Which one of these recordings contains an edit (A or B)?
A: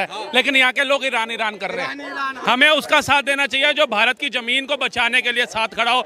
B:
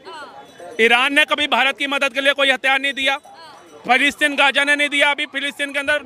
A